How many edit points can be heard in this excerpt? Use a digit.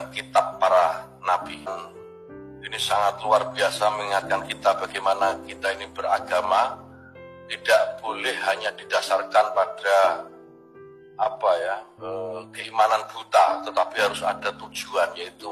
1